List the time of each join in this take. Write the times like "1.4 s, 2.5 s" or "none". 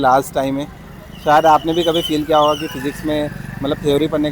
none